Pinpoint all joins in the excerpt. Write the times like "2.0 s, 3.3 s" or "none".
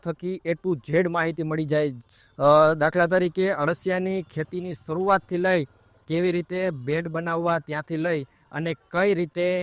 none